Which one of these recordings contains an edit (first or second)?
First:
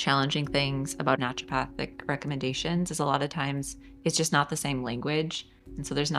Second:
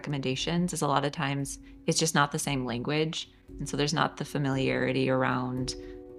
first